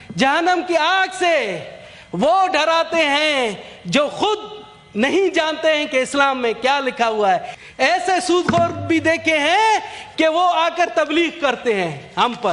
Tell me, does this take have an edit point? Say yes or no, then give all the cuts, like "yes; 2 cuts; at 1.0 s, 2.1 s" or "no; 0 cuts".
yes; 1 cut; at 7.6 s